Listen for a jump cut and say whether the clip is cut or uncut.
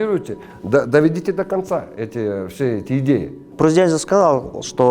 cut